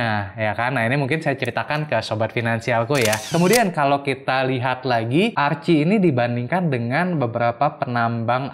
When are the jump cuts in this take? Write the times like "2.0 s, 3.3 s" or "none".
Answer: 3.3 s, 5.3 s